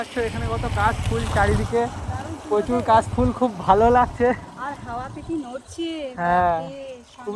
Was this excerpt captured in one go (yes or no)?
yes